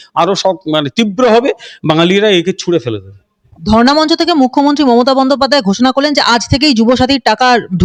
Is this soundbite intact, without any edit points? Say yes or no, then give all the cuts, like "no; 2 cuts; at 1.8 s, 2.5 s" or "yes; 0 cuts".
yes; 0 cuts